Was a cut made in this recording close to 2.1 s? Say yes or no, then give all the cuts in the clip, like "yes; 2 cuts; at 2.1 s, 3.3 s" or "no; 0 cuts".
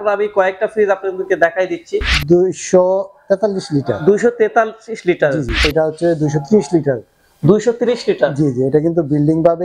yes; 2 cuts; at 2.1 s, 5.7 s